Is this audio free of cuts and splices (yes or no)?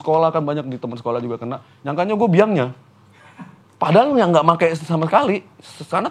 yes